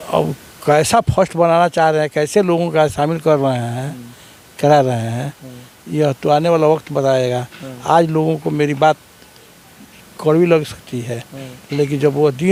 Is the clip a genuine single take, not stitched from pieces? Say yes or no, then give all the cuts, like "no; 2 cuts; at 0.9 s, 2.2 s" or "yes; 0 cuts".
yes; 0 cuts